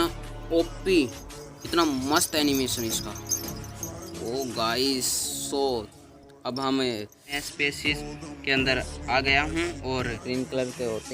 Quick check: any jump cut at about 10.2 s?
yes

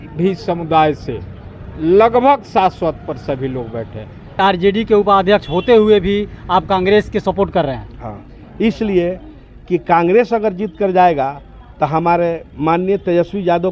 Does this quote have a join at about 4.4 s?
yes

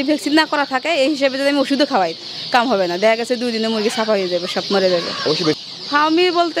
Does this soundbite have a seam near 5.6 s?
yes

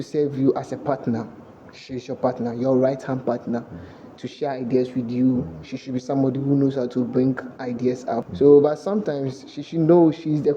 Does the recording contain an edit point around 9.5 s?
no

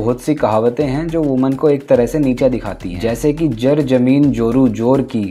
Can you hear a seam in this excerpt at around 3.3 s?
no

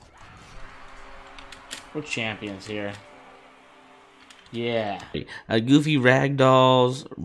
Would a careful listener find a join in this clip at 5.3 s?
yes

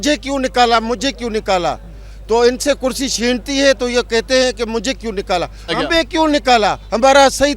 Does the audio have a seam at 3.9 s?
no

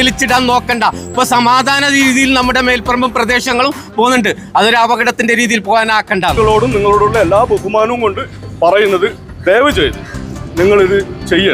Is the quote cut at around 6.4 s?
yes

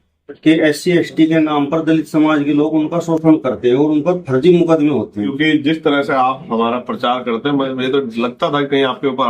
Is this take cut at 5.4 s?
yes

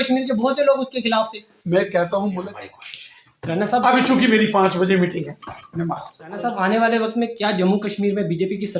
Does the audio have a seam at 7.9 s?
no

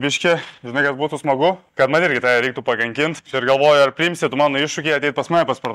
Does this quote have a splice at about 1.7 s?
yes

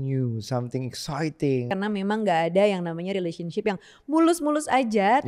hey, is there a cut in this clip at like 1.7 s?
yes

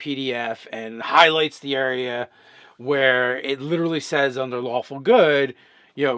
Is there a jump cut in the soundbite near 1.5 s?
no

